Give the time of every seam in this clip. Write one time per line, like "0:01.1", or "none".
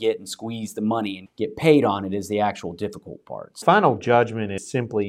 0:03.6